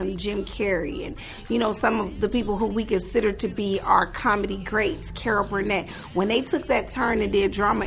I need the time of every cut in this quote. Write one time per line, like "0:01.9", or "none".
none